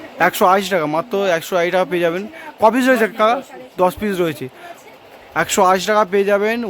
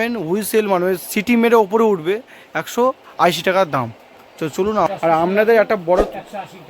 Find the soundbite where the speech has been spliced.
second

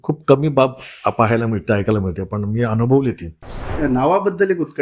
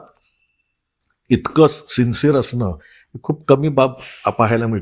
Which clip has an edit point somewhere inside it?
first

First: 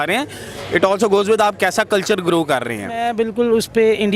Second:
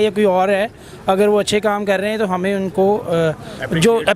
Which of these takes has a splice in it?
first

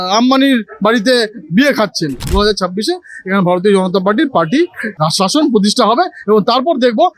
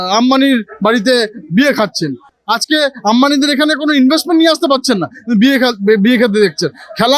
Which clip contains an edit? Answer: first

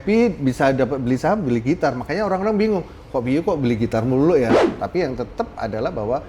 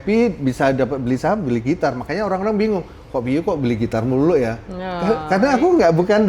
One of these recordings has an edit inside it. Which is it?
first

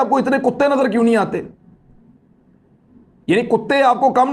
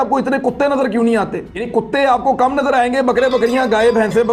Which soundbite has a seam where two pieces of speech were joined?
second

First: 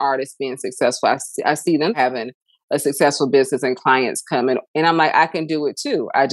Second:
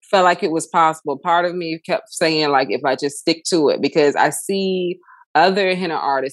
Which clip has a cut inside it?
first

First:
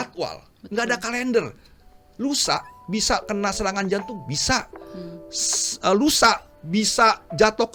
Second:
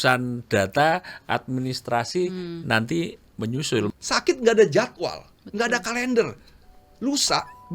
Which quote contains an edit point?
second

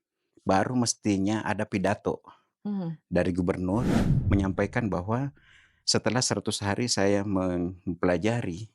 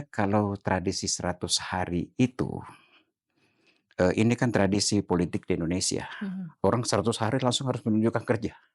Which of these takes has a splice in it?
first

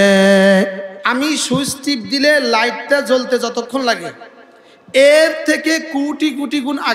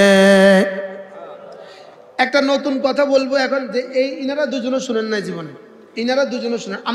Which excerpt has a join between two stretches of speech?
first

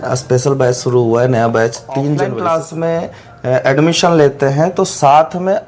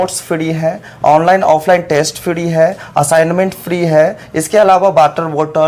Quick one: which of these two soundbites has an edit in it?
first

